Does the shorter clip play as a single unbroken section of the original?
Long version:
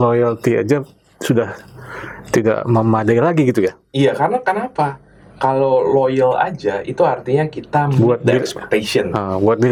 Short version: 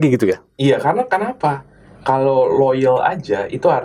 yes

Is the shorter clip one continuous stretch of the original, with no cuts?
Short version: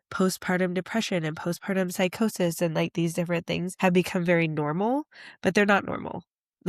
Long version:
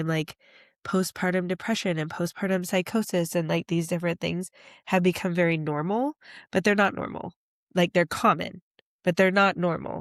no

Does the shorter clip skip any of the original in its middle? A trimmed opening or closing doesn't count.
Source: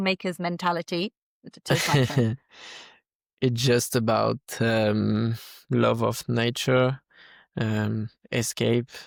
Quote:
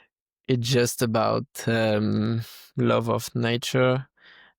no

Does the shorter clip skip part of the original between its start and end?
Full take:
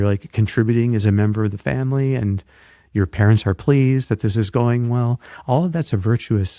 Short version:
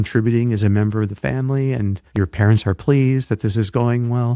yes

